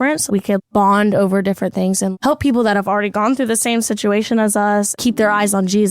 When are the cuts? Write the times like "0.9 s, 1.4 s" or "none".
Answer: 4.9 s